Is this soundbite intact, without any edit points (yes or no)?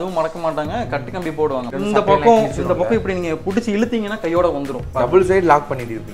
no